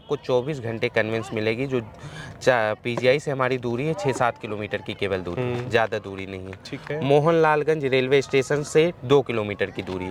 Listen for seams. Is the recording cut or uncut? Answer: uncut